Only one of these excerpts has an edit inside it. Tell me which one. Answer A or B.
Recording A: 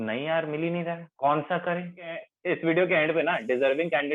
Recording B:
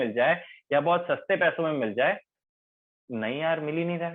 A